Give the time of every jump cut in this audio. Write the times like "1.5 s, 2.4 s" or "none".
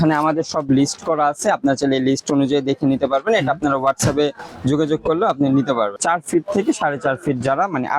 6.0 s